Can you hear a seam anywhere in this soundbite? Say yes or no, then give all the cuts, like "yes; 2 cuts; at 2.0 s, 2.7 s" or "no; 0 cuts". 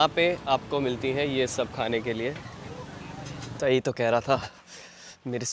yes; 1 cut; at 3.5 s